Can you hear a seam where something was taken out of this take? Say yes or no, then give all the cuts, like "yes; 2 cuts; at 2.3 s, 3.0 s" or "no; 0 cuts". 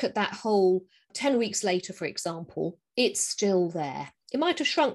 yes; 1 cut; at 1.1 s